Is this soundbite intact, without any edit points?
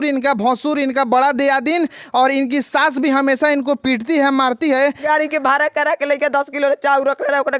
no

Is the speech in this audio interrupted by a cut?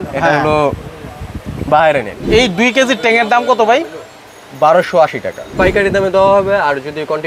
yes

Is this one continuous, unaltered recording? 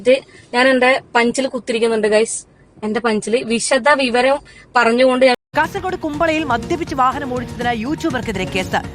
no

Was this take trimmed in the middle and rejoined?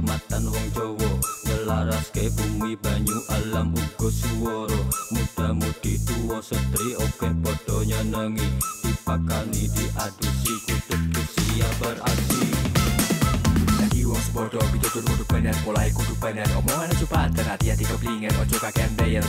no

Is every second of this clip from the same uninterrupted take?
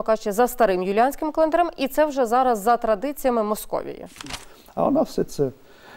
no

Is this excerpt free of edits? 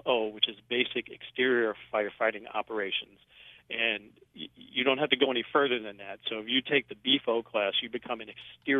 yes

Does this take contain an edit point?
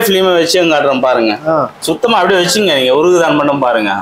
yes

